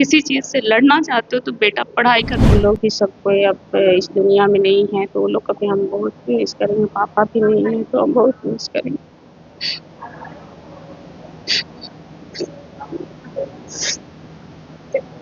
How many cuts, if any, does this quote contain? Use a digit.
1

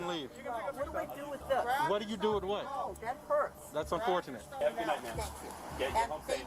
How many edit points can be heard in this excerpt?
1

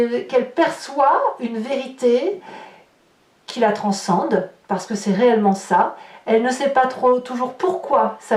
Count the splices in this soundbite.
0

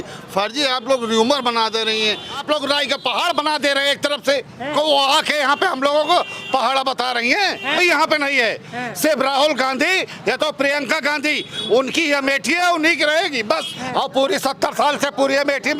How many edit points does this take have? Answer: 4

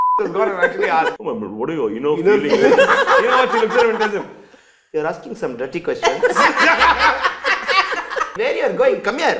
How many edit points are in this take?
2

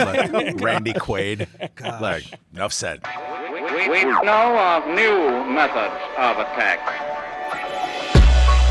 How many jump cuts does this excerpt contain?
1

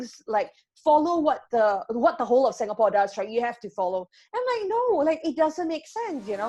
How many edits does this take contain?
0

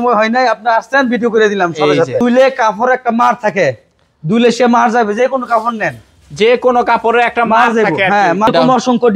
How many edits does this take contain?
2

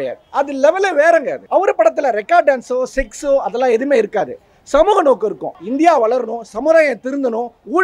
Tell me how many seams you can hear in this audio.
2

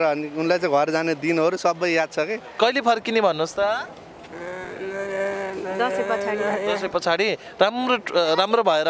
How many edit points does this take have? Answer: 1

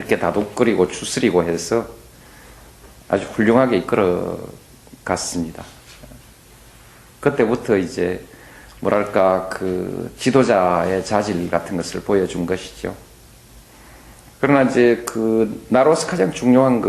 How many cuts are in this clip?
1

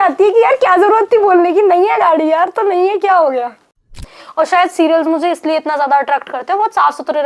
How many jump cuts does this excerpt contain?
1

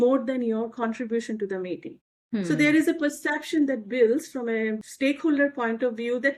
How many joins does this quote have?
0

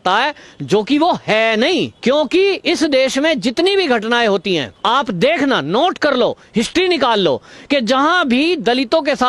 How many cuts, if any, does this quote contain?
2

